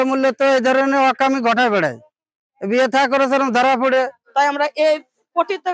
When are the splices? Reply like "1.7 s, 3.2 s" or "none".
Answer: 4.2 s